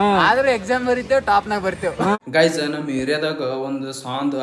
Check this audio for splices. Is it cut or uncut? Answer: cut